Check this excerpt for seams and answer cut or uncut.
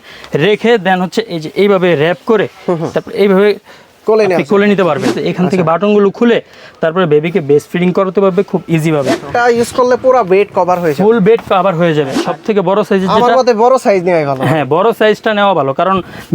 cut